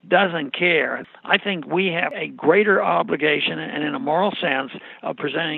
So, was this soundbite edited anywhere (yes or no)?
yes